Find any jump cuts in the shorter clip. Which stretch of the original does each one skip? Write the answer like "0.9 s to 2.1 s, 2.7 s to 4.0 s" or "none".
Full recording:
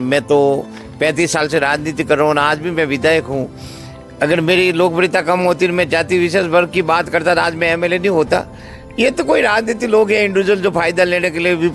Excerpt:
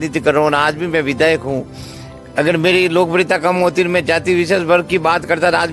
none